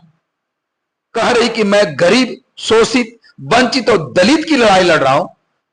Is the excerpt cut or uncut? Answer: uncut